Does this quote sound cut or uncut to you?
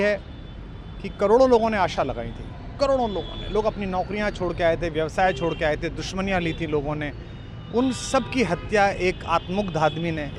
uncut